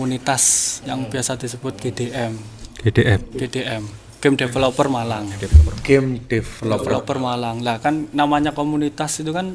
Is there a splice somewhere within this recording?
no; 0 cuts

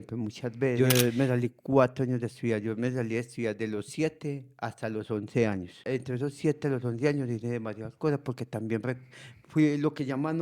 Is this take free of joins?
no; 2 cuts; at 0.8 s, 5.9 s

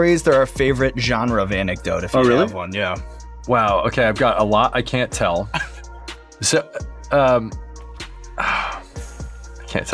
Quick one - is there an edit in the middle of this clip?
no; 0 cuts

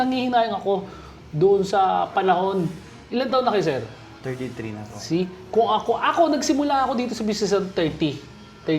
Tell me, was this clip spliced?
no; 0 cuts

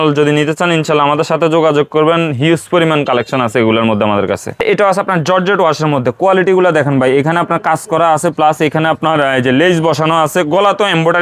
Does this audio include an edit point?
yes; 1 cut; at 4.6 s

